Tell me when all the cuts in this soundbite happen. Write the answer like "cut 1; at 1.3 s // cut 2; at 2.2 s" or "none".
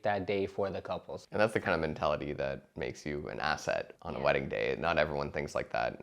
cut 1; at 1.1 s // cut 2; at 2.7 s // cut 3; at 3.9 s